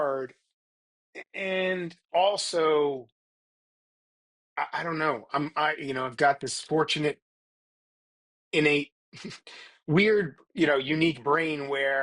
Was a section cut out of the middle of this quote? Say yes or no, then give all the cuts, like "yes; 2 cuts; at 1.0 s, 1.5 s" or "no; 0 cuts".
no; 0 cuts